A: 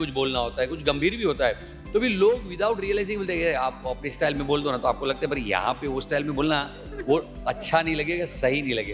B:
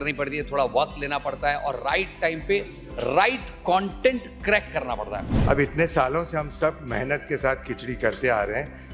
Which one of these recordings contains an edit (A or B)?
B